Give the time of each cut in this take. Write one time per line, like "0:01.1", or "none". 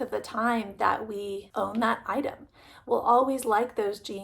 0:01.4